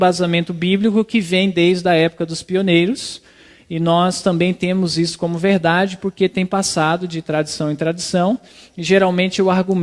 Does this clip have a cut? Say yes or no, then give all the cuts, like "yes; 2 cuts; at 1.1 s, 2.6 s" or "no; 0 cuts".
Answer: yes; 1 cut; at 2.1 s